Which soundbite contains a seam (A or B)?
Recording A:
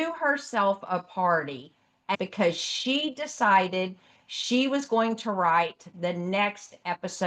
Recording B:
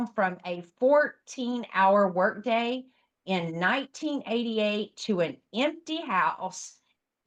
A